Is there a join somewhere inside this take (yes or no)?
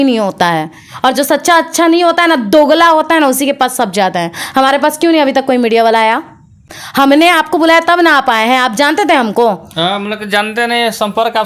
no